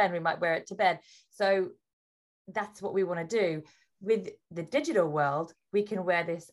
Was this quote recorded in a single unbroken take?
no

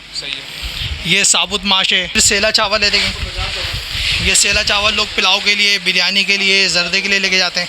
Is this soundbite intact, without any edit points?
no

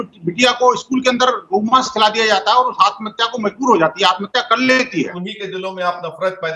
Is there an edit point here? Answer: yes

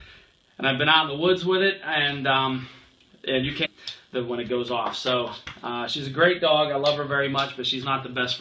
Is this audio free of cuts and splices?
yes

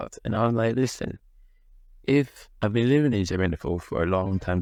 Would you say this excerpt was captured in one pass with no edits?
yes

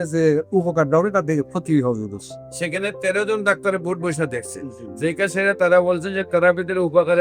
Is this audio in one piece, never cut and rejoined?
yes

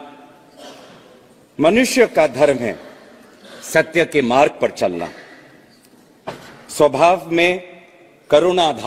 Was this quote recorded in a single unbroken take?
yes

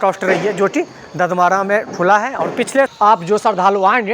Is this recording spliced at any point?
yes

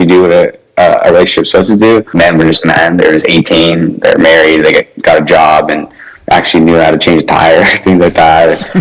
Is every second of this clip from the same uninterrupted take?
no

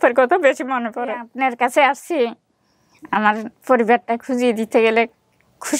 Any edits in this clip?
yes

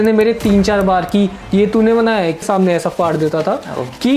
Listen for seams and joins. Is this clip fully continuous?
no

